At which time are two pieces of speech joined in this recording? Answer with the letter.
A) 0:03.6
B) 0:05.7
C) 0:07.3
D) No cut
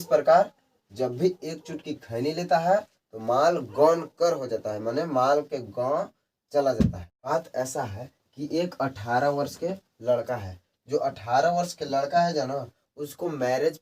C